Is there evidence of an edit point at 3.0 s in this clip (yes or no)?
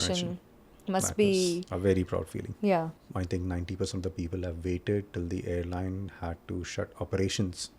yes